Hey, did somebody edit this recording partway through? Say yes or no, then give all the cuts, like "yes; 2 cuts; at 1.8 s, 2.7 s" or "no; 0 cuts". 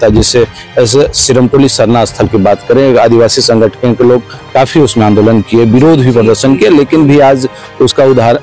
no; 0 cuts